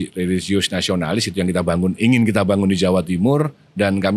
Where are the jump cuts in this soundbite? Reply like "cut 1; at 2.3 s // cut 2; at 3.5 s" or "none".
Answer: none